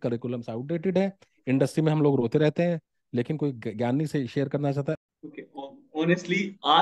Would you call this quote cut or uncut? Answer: cut